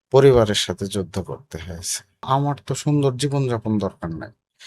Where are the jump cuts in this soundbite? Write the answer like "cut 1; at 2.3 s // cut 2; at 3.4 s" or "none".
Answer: cut 1; at 2.2 s